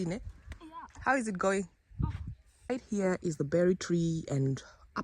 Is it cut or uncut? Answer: cut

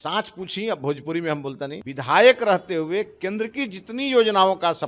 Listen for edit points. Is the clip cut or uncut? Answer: cut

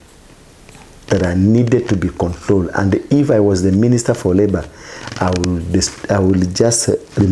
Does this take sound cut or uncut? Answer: uncut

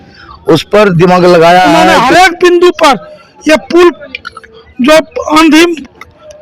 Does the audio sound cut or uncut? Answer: cut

